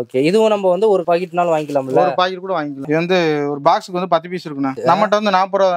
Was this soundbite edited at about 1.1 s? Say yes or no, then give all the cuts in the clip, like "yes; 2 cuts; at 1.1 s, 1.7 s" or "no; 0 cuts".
no; 2 cuts; at 2.8 s, 4.8 s